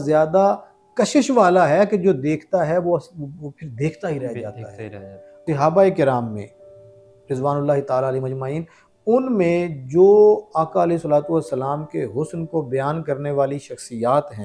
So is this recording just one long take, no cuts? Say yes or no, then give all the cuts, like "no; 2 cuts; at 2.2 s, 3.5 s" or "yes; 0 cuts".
no; 1 cut; at 5.4 s